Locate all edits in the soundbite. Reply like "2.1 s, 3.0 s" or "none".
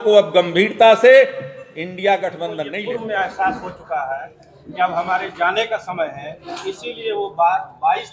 2.6 s